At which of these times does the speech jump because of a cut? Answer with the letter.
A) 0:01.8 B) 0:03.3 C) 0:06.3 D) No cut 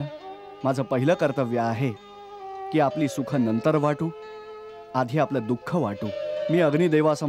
C